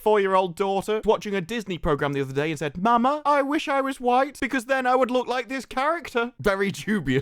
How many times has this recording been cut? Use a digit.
2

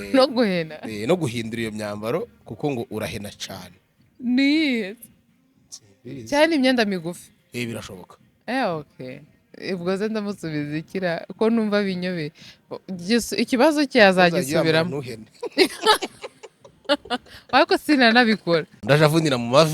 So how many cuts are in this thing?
1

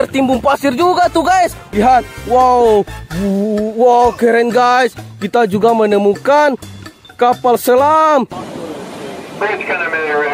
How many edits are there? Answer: 1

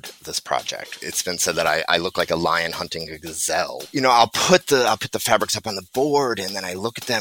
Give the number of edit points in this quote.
2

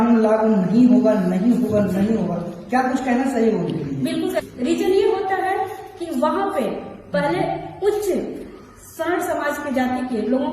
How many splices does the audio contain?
1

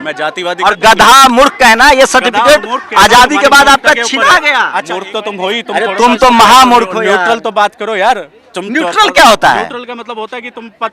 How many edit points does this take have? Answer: 1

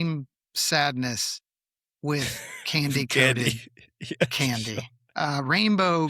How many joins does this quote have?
0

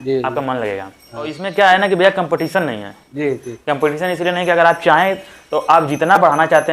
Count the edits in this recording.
1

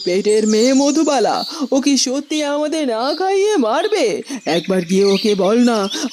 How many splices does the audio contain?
0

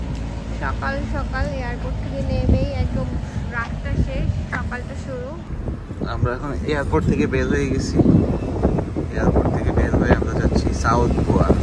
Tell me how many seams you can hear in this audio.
1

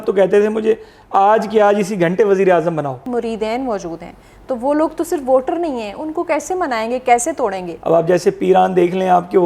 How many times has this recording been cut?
2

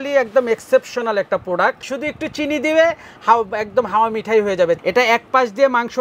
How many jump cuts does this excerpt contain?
2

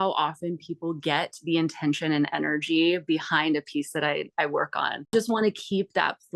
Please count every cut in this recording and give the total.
1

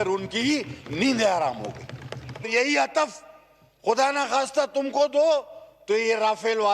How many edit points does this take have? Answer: 1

